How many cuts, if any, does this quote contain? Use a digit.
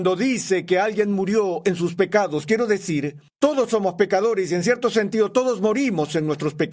1